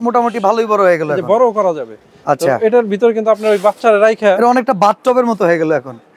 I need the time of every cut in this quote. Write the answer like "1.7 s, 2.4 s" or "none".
none